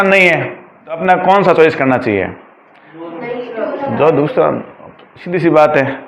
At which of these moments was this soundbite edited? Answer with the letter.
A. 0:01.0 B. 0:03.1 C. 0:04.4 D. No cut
A